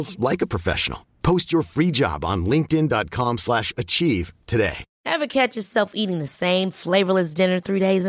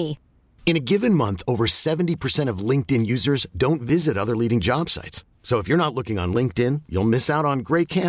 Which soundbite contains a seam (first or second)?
first